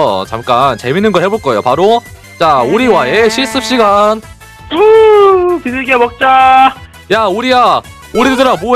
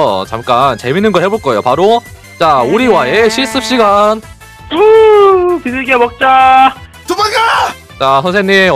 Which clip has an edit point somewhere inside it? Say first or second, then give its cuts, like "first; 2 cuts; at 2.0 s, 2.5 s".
second; 1 cut; at 6.9 s